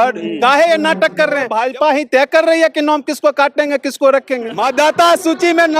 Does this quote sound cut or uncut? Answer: cut